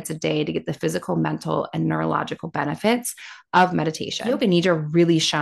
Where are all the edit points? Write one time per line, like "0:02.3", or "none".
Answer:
0:04.2

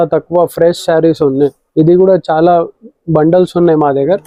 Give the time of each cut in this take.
none

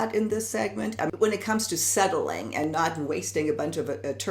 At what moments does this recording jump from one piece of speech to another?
0:01.1

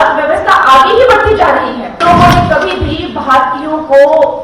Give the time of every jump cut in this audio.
0:02.0

